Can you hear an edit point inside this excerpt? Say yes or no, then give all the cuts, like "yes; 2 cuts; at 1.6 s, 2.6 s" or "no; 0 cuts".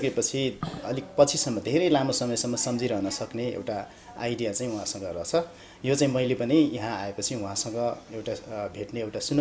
no; 0 cuts